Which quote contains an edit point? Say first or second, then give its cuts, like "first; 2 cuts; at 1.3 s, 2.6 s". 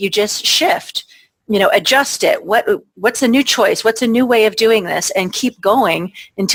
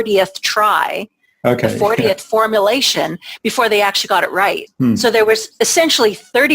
second; 1 cut; at 4.7 s